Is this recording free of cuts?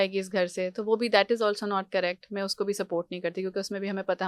yes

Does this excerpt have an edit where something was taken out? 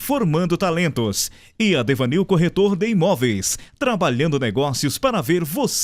no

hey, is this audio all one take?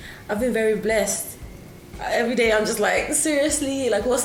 yes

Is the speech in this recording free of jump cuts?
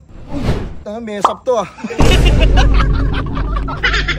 yes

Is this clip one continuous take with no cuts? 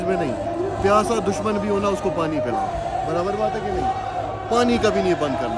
yes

